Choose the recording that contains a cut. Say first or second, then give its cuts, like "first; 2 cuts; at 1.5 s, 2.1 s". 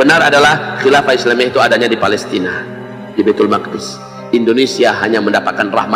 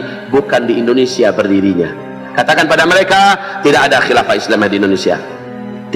second; 1 cut; at 2.2 s